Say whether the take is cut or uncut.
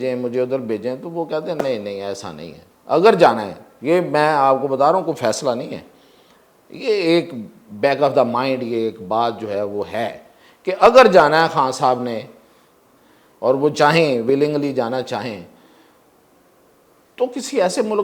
uncut